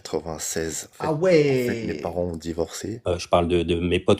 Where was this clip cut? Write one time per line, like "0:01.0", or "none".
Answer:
0:02.9